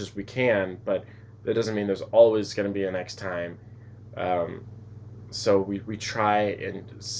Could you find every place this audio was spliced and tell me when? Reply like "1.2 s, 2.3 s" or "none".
none

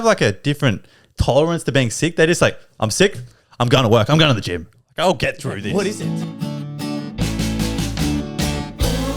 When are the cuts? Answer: 6.0 s

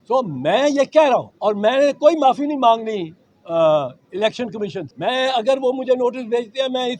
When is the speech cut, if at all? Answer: 1.3 s, 4.9 s

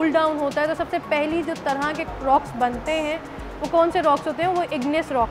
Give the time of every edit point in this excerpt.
none

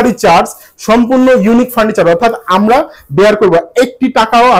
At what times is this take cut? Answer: none

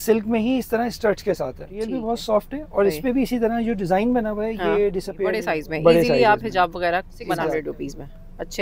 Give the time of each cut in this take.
2.0 s, 5.4 s, 7.5 s

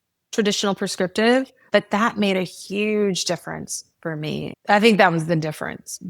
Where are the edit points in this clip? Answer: 1.6 s

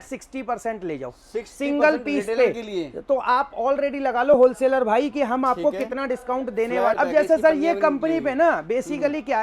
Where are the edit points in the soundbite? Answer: 7.0 s

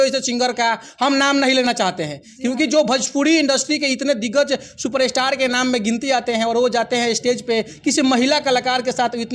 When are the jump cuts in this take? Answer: none

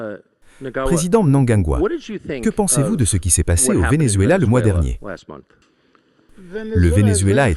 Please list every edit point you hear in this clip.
0.9 s

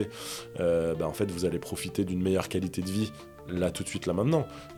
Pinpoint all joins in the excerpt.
none

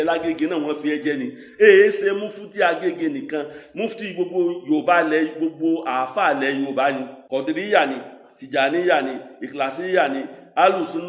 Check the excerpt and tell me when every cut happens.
7.1 s

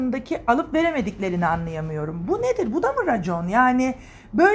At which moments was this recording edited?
none

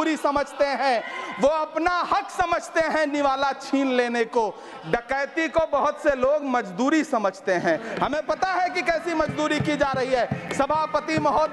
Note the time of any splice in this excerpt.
none

